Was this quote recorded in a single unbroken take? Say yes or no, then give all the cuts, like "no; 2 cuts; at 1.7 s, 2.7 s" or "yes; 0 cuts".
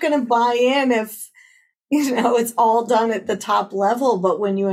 yes; 0 cuts